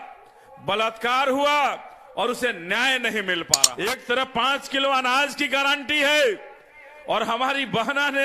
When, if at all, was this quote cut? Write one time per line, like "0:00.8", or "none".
0:03.5

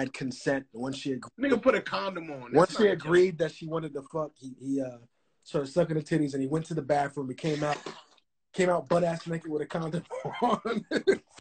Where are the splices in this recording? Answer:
none

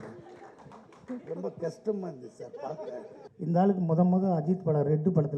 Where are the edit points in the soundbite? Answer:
0:03.2

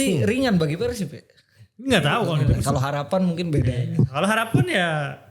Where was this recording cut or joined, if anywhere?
0:02.4

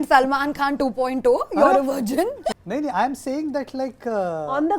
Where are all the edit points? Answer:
0:02.6

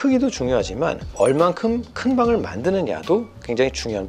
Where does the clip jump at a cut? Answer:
0:01.2

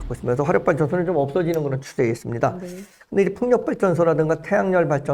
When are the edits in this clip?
none

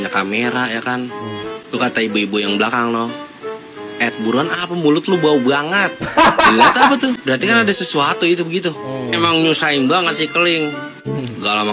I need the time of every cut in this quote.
0:07.2

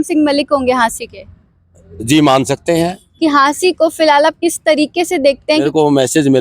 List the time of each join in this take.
0:03.0
0:05.6

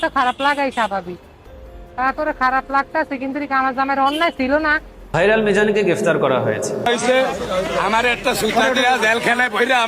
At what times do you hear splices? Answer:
0:05.0

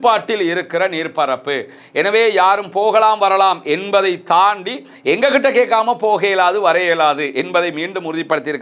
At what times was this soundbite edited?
none

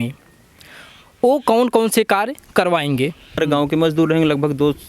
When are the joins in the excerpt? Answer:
0:03.4

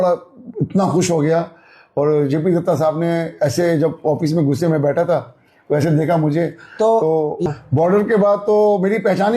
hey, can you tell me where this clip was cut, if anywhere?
0:07.4

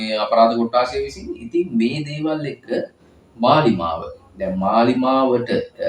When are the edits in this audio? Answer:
none

